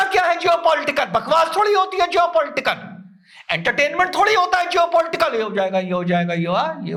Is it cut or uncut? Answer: uncut